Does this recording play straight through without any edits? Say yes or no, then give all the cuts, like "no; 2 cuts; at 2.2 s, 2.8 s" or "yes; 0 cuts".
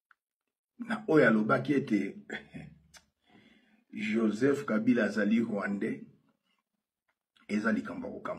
yes; 0 cuts